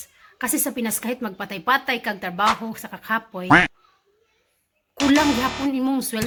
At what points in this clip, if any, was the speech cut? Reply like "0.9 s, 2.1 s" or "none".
none